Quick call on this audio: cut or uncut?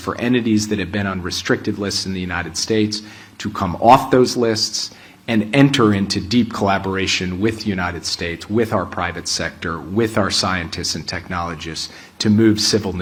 uncut